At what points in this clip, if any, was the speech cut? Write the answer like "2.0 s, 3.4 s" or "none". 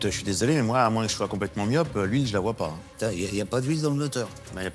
2.8 s